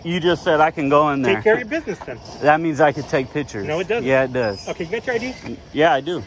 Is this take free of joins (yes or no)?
yes